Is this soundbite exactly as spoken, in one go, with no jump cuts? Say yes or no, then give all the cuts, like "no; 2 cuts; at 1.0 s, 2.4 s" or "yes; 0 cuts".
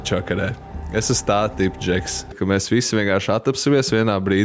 no; 1 cut; at 2.3 s